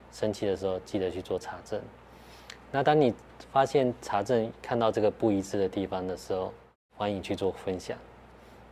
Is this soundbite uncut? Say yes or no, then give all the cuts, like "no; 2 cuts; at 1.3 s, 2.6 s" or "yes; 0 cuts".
yes; 0 cuts